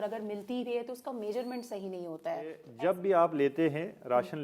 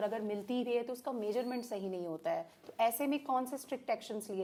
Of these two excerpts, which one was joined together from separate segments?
first; 1 cut; at 2.7 s

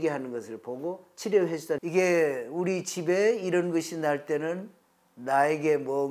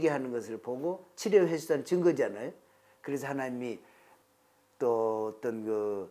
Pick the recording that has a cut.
first; 1 cut; at 1.8 s

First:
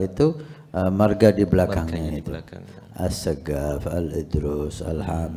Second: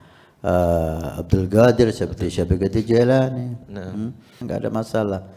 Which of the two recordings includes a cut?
second; 1 cut; at 4.4 s

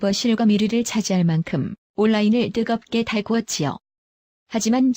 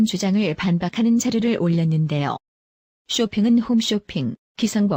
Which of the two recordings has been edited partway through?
first; 1 cut; at 4.0 s

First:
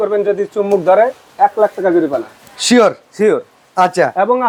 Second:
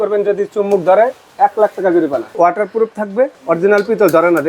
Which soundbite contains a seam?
second; 2 cuts; at 2.4 s, 3.4 s

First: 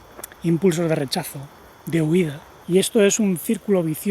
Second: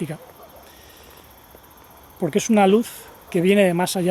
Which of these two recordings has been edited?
first; 1 cut; at 2.5 s

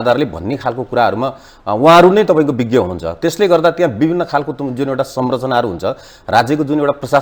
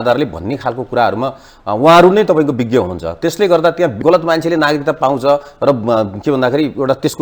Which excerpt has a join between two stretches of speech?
second; 1 cut; at 3.9 s

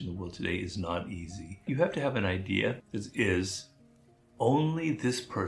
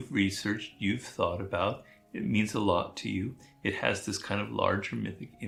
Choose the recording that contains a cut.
first; 2 cuts; at 1.5 s, 2.8 s

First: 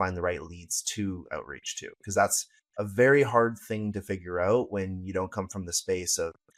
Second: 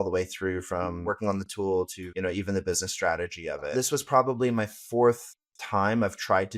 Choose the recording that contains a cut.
second; 3 cuts; at 1.0 s, 2.0 s, 3.7 s

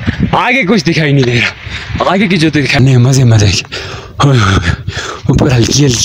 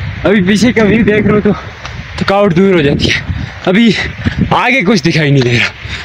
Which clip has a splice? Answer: first; 1 cut; at 2.8 s

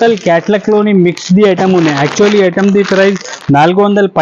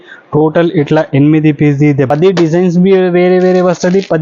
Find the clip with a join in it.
second; 1 cut; at 2.1 s

